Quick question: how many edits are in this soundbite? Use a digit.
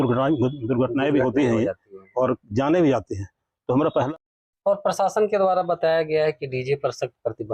1